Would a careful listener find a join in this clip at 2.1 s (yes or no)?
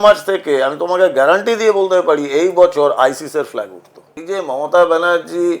no